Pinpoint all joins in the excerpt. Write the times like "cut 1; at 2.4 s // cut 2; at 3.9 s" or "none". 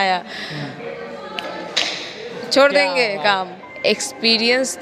cut 1; at 3.6 s